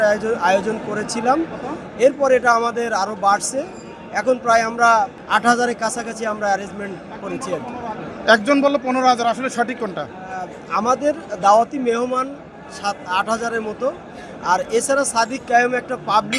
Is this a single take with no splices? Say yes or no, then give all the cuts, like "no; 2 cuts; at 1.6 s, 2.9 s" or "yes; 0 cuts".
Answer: no; 1 cut; at 5.1 s